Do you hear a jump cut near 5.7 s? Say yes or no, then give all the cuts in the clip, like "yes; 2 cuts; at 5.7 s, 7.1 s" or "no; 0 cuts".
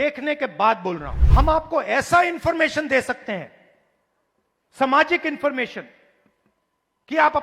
no; 1 cut; at 1.1 s